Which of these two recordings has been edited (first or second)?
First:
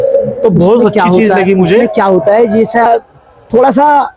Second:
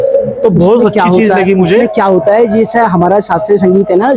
first